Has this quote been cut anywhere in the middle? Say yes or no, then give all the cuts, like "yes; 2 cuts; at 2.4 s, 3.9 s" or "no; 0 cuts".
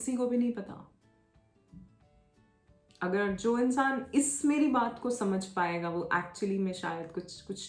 no; 0 cuts